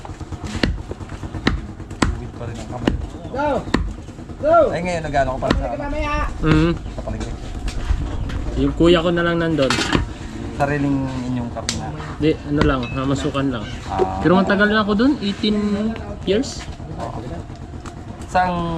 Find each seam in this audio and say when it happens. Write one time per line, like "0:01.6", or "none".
none